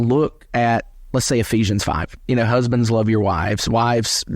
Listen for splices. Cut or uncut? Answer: cut